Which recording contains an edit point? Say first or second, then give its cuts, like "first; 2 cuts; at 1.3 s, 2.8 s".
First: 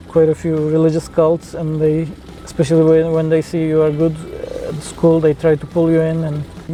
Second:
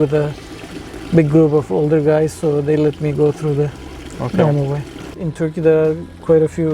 second; 1 cut; at 5.1 s